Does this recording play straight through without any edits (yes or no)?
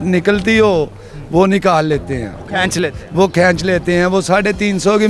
yes